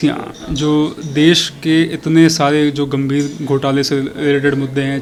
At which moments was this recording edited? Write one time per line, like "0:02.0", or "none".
none